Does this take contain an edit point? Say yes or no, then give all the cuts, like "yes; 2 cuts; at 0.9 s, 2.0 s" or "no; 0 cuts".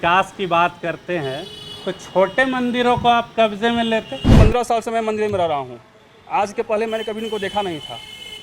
yes; 1 cut; at 4.4 s